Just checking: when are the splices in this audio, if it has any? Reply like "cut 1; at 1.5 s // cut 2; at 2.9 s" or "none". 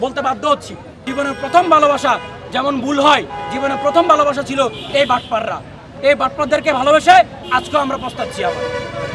cut 1; at 1.0 s